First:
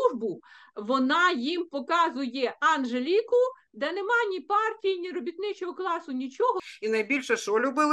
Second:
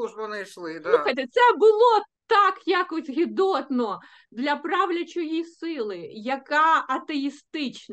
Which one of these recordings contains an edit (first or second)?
first